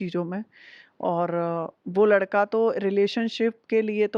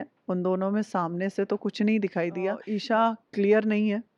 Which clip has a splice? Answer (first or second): second